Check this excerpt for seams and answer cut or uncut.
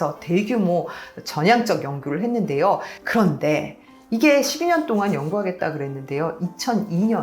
cut